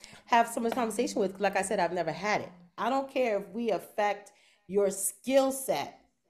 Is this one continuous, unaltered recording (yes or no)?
no